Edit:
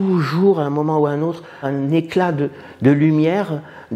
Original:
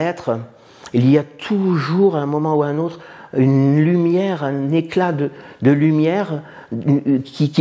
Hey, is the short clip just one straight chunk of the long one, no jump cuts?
no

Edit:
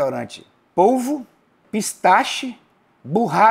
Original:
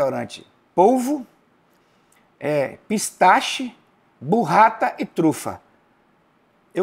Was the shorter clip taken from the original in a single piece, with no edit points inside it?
no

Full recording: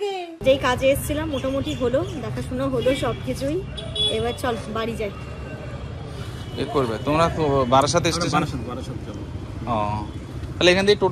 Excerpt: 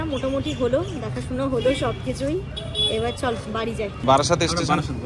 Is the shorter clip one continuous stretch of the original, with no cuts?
no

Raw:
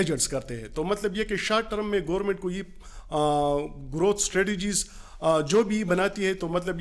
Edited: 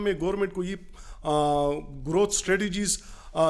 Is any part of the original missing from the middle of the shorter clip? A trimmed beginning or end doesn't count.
no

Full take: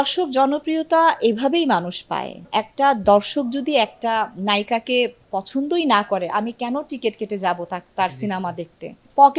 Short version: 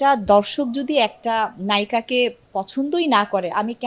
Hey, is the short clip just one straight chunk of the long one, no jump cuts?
yes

